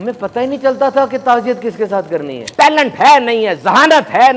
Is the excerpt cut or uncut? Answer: cut